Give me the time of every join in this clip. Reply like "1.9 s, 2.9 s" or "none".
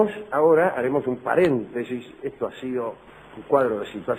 none